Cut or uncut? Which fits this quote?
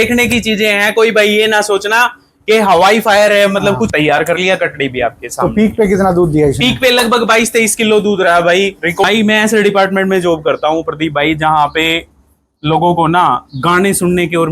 cut